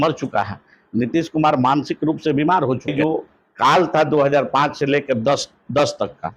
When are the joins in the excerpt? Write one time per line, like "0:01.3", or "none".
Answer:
0:02.9

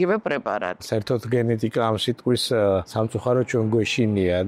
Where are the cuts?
0:00.8
0:02.9

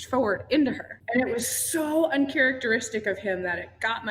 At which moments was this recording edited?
0:00.9

